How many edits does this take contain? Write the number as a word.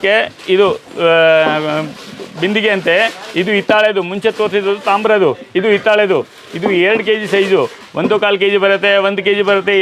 zero